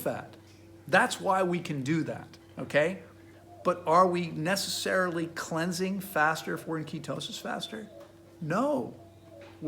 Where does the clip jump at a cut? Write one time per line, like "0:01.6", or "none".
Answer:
0:03.3